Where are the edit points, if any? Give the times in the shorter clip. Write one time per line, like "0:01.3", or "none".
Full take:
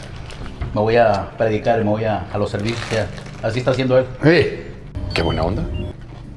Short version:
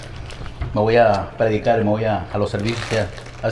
none